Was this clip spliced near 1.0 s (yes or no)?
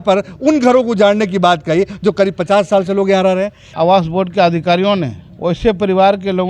no